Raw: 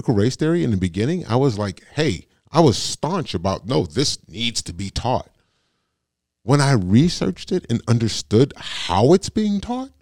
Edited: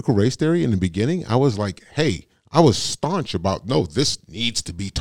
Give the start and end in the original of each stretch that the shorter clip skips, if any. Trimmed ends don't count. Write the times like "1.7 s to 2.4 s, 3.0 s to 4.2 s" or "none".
none